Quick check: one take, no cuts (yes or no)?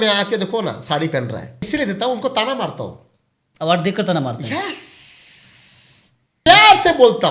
no